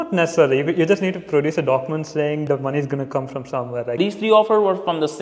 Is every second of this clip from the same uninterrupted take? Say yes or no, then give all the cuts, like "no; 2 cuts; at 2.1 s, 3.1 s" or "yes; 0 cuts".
no; 1 cut; at 4.0 s